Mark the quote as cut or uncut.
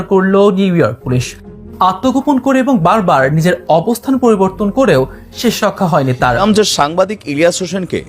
cut